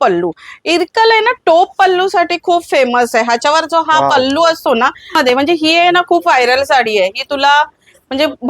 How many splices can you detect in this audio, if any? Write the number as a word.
one